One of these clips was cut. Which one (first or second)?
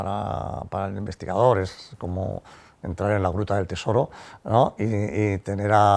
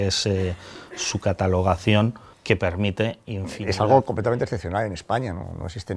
second